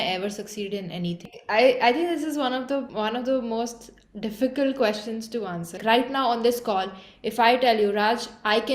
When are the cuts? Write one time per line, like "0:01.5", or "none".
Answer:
0:01.3
0:05.8